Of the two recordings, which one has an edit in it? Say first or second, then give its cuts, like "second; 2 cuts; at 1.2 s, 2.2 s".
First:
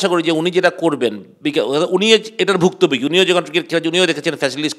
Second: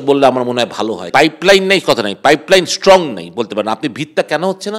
second; 1 cut; at 1.1 s